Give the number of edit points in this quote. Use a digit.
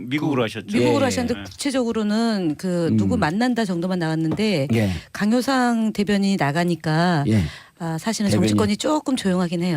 1